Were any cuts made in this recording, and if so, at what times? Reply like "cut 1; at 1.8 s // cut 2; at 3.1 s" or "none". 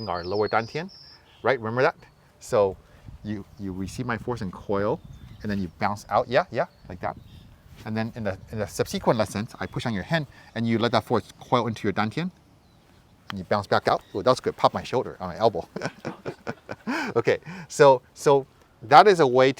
none